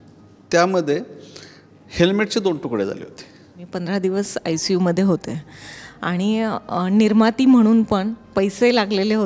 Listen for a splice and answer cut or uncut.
cut